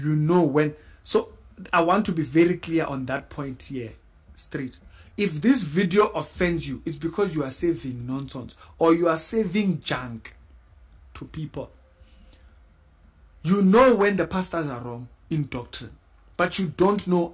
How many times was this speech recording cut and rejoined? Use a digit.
0